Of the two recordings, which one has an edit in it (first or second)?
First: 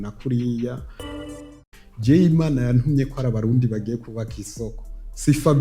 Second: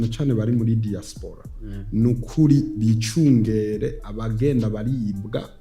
first